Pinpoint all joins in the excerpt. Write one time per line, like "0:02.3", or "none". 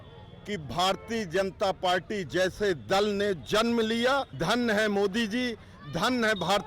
0:04.3

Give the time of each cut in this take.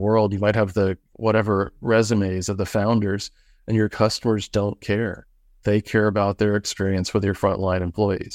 none

